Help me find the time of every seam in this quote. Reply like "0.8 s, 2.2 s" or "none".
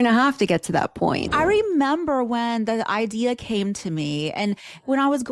1.3 s